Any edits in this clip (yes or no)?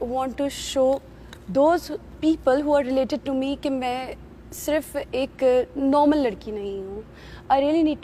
no